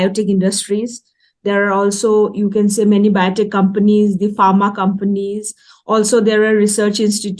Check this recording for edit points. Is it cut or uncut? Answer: uncut